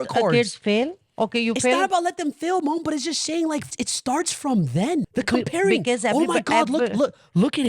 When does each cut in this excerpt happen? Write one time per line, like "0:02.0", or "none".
0:03.7
0:05.1